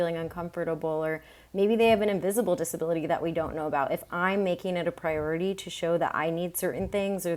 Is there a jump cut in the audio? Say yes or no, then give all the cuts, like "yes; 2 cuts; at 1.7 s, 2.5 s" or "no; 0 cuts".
no; 0 cuts